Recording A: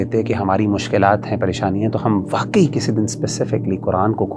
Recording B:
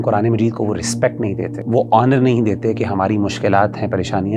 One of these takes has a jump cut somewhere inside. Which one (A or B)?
B